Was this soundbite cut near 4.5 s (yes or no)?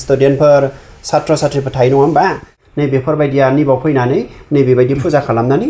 no